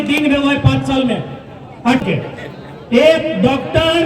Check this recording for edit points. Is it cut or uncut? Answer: cut